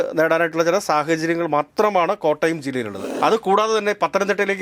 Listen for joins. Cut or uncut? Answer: cut